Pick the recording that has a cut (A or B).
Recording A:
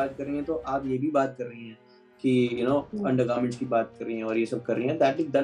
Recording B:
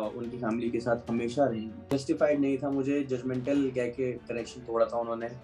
B